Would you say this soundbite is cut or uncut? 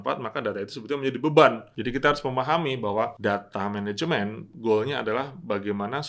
cut